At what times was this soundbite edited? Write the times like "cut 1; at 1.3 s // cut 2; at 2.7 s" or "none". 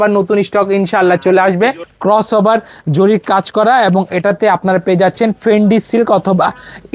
cut 1; at 1.9 s